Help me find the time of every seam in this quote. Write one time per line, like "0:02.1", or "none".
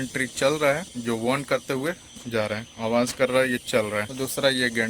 0:00.9
0:02.7
0:04.1